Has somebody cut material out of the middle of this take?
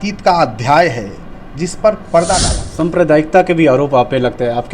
yes; 1 cut; at 2.6 s

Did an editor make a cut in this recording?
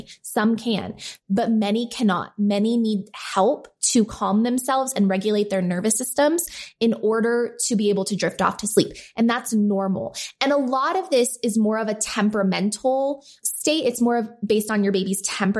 yes; 1 cut; at 13.4 s

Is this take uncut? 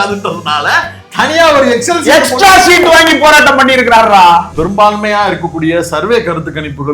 no; 1 cut; at 4.5 s

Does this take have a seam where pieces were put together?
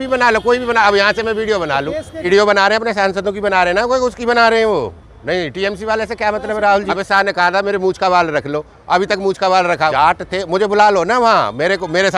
yes; 3 cuts; at 2.3 s, 6.9 s, 10.3 s

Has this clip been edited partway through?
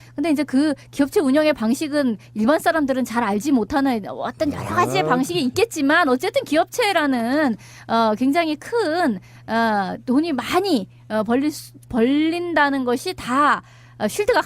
yes; 1 cut; at 5.6 s

